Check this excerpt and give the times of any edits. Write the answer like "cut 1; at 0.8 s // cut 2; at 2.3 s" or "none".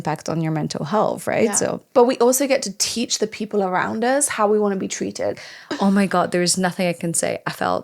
cut 1; at 1.9 s // cut 2; at 5.4 s